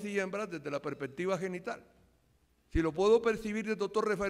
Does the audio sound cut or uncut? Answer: cut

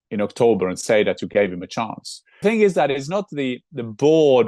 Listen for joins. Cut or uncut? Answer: cut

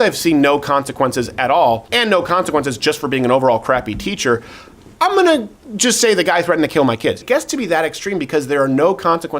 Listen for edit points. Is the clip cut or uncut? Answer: cut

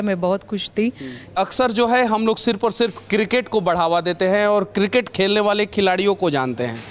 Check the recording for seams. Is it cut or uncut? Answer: cut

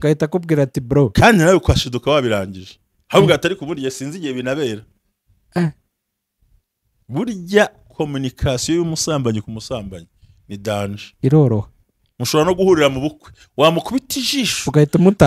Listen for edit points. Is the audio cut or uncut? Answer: uncut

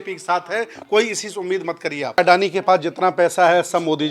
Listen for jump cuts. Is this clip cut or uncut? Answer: cut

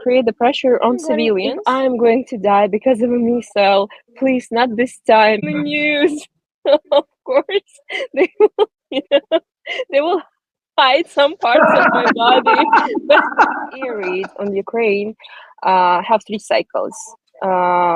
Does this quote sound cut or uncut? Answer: cut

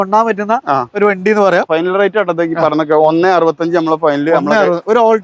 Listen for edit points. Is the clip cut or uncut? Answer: cut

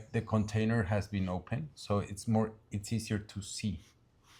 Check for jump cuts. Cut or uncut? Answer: uncut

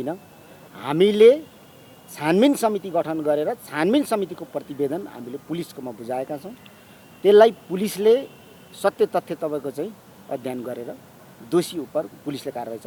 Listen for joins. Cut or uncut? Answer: uncut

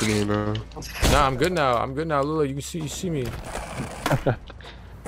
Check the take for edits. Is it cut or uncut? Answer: uncut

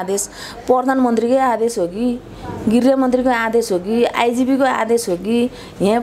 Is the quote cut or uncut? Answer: uncut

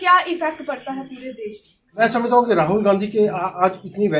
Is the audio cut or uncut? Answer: cut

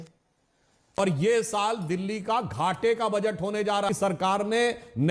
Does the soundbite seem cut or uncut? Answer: cut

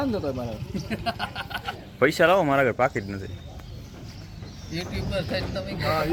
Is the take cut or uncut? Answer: uncut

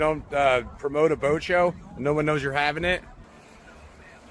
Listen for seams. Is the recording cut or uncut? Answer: uncut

